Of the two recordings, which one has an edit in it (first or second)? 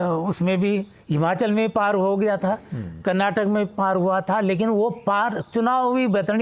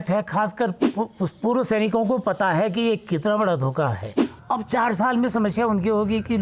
second